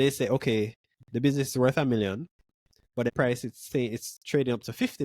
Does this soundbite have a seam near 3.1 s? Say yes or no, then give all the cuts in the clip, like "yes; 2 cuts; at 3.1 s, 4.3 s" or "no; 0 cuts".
yes; 1 cut; at 3.1 s